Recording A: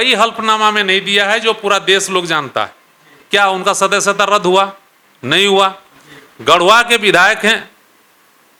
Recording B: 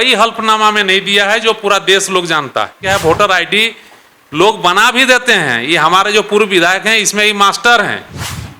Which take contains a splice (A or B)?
B